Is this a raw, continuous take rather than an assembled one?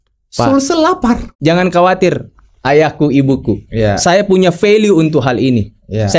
no; 1 cut; at 1.3 s

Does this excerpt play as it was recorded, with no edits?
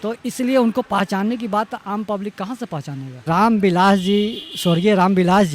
no; 1 cut; at 3.2 s

